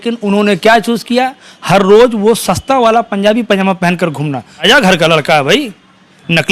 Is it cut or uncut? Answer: cut